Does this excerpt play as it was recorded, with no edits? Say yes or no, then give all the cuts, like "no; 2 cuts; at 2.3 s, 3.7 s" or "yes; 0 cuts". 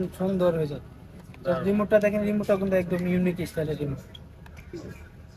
yes; 0 cuts